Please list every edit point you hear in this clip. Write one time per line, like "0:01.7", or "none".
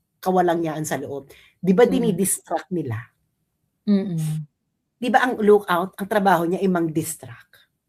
none